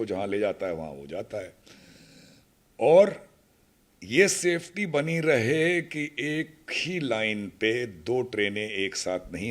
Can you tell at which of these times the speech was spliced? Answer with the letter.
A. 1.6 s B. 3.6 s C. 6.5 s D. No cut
D